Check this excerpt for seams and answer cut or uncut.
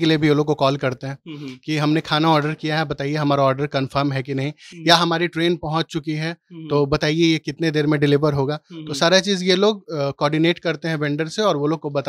uncut